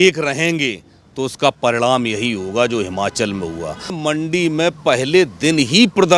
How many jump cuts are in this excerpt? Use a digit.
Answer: 1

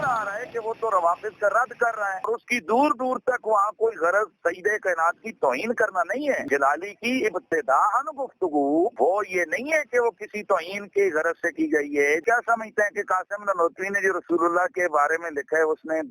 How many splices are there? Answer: 3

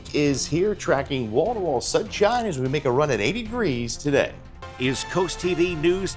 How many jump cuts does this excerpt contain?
1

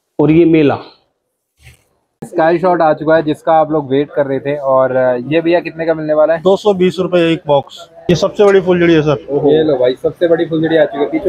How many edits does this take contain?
2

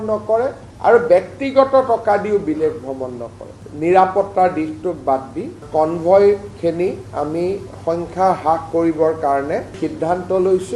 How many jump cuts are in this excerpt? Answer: 1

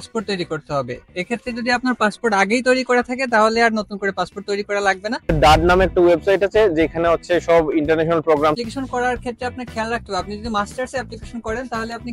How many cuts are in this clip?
2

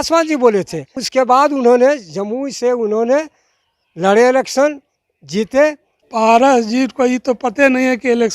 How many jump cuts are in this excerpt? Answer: 2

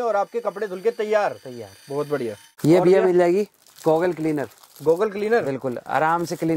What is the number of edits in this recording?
0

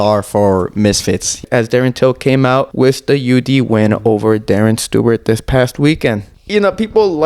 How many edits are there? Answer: 3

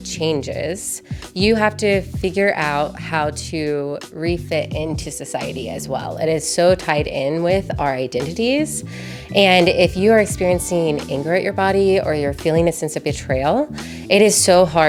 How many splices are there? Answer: 0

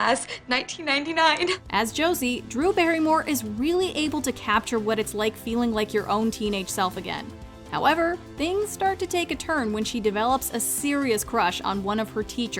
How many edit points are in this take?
0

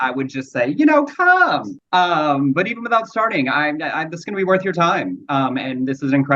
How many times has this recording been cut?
1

